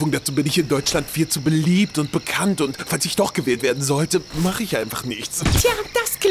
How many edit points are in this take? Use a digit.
0